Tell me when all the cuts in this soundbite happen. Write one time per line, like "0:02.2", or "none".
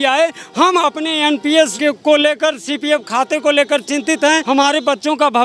0:01.7
0:04.4